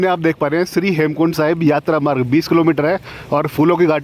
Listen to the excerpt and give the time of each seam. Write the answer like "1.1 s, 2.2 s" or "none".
none

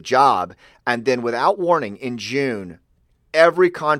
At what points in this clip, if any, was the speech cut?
1.6 s

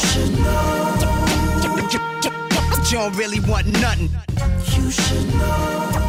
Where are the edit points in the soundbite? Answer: none

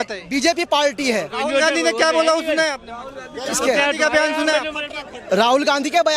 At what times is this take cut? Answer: none

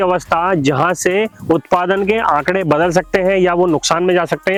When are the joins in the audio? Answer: none

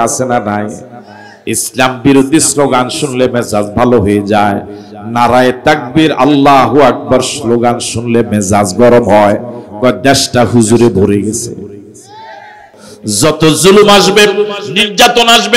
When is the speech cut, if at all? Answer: 12.9 s

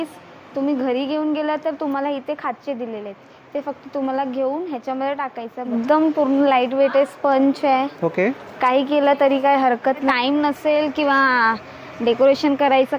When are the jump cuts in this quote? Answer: 5.7 s, 10.1 s

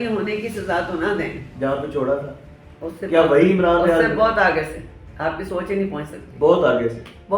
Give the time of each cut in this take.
1.4 s

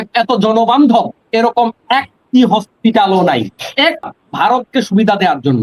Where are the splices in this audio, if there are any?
4.1 s

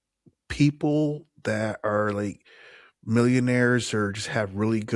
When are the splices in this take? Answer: none

